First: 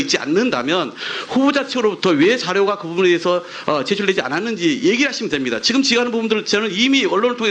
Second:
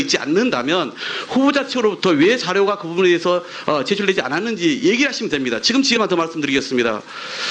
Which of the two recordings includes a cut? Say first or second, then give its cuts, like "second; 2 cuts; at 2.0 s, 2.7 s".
first; 1 cut; at 5.9 s